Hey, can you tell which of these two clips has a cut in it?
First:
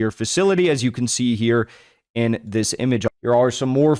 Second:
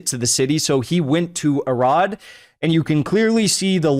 first; 1 cut; at 3.0 s

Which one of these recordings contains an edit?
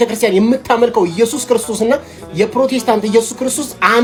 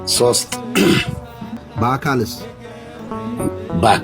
second; 2 cuts; at 1.6 s, 3.0 s

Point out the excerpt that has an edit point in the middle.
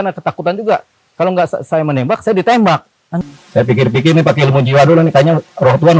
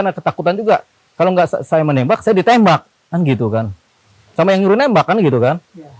first; 1 cut; at 3.1 s

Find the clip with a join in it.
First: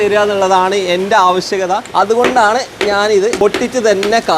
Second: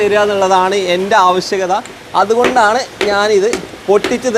first; 2 cuts; at 1.9 s, 3.4 s

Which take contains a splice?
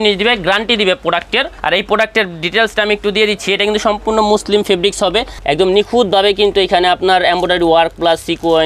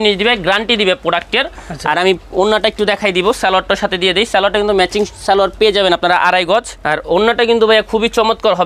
first; 2 cuts; at 1.5 s, 5.3 s

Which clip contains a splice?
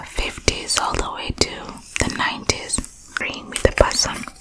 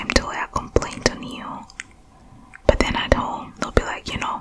first; 1 cut; at 3.4 s

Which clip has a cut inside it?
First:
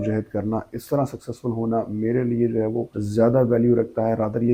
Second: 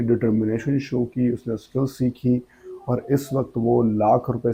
first; 1 cut; at 3.0 s

